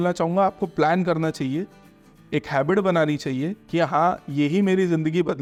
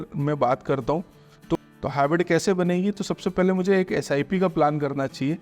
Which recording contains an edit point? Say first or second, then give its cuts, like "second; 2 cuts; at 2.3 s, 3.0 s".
second; 1 cut; at 1.5 s